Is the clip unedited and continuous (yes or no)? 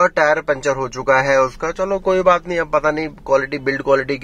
yes